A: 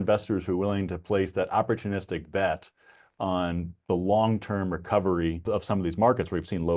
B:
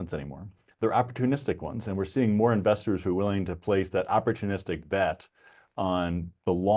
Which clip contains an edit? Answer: A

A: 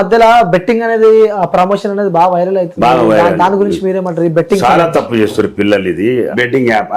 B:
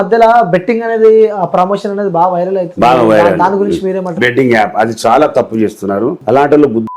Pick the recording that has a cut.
B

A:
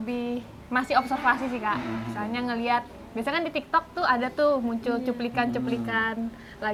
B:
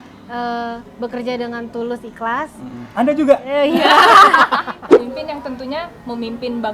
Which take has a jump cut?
B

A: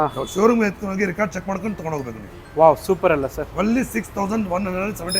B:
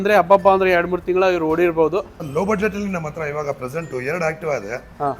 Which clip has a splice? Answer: B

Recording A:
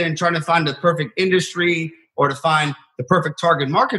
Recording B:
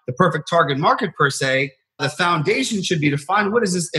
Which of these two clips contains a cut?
B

